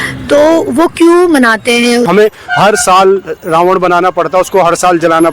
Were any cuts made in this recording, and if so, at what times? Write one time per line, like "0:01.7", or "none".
0:02.1